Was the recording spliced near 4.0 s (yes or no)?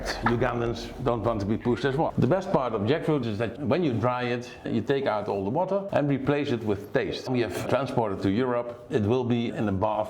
no